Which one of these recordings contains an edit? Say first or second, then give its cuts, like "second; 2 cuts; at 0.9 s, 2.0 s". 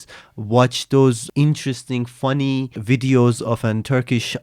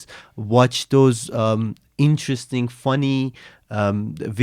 first; 2 cuts; at 1.2 s, 2.8 s